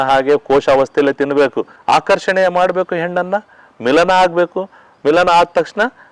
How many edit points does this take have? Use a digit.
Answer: 1